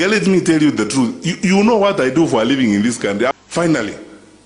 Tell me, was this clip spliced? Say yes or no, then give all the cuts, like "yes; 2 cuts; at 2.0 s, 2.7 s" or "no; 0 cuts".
yes; 1 cut; at 3.3 s